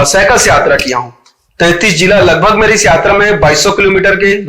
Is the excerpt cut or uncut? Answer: uncut